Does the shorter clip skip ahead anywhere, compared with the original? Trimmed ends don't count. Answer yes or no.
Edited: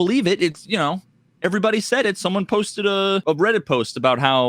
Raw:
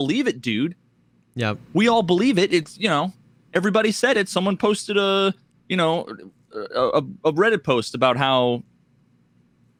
yes